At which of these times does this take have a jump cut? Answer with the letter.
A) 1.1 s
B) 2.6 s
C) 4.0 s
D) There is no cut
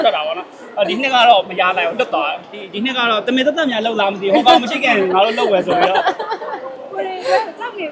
B